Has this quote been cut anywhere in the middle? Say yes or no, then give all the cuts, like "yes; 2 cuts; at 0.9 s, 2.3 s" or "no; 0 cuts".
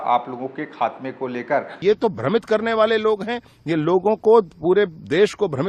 yes; 1 cut; at 1.8 s